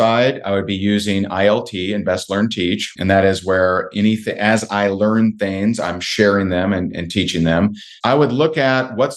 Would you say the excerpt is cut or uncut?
cut